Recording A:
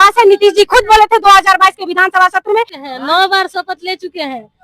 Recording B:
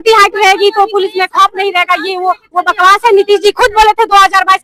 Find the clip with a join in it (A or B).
A